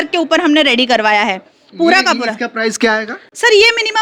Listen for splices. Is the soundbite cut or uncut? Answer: uncut